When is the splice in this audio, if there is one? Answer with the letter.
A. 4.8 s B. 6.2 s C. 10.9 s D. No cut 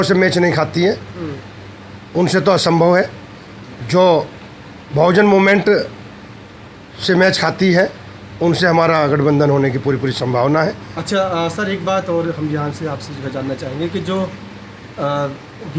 D